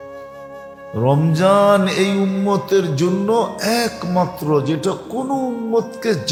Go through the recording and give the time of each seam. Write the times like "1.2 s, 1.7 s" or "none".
none